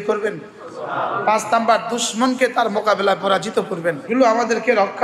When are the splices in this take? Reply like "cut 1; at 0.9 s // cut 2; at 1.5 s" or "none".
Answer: cut 1; at 4.1 s